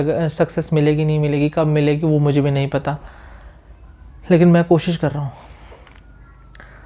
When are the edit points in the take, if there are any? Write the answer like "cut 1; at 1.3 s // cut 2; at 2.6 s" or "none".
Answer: none